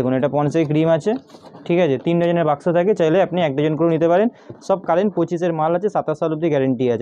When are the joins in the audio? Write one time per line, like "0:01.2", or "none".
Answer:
none